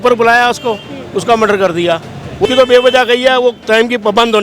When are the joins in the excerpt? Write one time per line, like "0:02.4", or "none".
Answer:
0:02.5